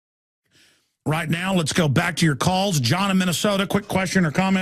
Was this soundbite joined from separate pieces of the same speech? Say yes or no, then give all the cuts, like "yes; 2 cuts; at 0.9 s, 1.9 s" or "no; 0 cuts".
no; 0 cuts